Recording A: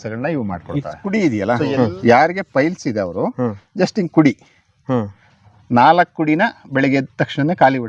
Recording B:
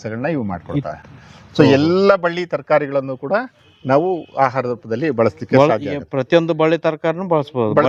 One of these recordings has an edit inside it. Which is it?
A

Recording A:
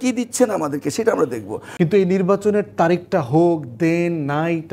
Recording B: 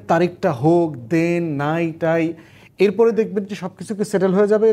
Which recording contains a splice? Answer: A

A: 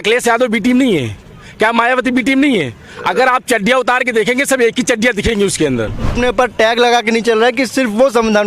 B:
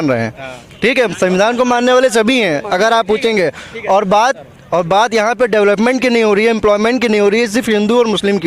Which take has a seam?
A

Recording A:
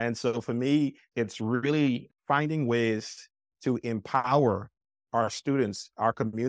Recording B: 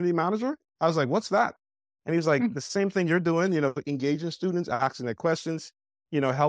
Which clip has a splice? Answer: A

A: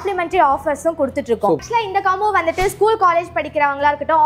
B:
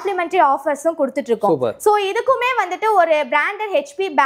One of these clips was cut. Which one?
A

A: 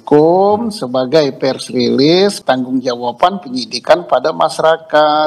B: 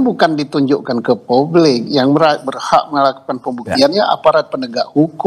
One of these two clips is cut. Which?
A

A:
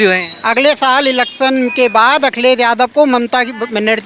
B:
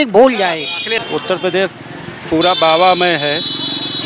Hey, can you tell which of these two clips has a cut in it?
B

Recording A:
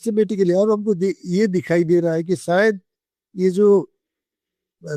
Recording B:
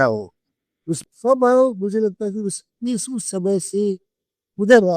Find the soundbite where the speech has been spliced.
B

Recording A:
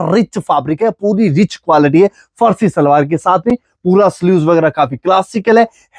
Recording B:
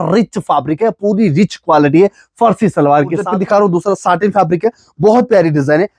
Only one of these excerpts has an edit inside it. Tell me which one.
B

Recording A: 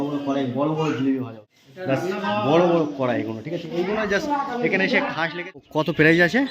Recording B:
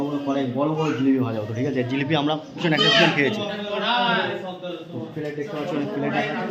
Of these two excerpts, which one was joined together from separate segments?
A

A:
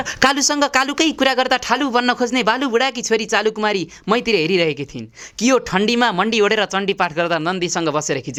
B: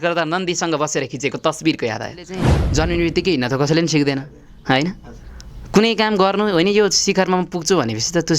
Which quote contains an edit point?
B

